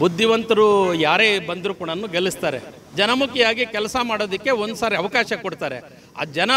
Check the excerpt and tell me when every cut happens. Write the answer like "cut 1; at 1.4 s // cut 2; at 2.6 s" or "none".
none